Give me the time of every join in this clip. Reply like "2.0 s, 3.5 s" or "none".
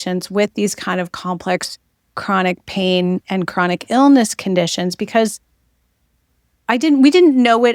none